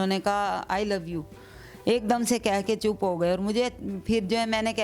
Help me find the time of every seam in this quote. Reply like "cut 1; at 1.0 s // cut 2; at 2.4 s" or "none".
none